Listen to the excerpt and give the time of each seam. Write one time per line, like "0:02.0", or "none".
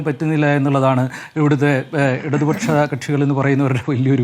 none